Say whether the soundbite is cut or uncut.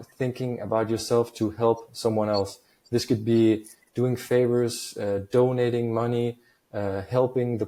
uncut